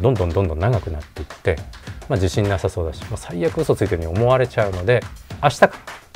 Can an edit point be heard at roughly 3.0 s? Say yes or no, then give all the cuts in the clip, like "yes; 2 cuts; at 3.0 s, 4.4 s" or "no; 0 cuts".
no; 2 cuts; at 1.8 s, 5.2 s